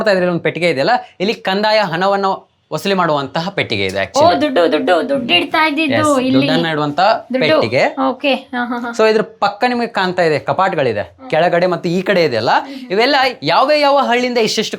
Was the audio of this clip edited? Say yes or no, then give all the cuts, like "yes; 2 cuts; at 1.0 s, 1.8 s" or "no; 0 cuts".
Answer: no; 0 cuts